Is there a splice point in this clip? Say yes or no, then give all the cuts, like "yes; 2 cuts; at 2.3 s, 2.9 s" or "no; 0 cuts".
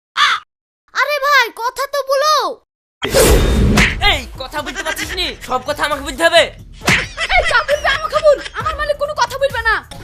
no; 0 cuts